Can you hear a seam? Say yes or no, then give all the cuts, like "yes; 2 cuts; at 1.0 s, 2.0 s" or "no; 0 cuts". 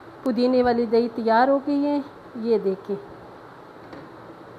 no; 0 cuts